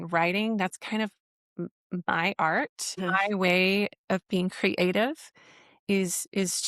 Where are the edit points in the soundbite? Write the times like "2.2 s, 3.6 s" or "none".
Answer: 3.1 s